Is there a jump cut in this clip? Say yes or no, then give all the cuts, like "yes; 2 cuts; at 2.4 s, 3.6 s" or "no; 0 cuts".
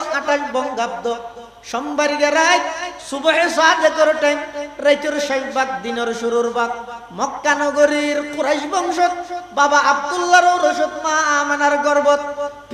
no; 0 cuts